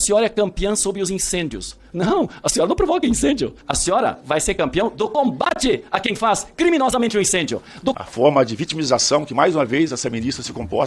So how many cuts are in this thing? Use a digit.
2